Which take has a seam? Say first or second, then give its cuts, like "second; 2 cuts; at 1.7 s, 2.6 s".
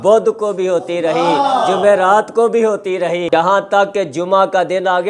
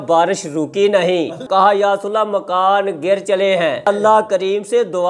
second; 2 cuts; at 1.4 s, 3.8 s